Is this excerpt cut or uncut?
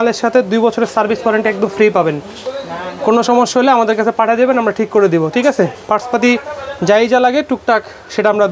uncut